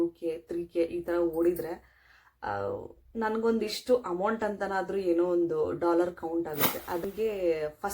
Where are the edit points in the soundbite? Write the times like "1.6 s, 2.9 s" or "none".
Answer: 7.0 s